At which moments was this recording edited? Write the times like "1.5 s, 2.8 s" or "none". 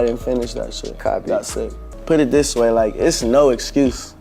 1.9 s